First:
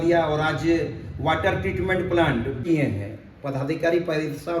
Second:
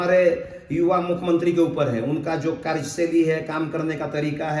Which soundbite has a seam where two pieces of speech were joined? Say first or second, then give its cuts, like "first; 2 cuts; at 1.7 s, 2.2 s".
first; 1 cut; at 2.6 s